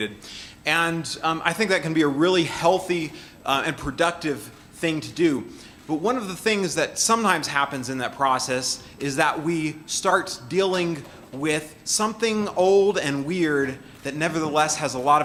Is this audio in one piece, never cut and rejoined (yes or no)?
yes